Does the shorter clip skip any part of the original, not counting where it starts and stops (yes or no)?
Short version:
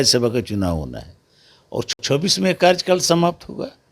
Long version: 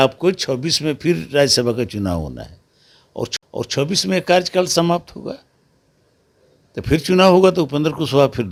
yes